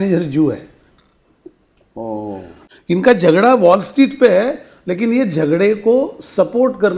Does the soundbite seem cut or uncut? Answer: cut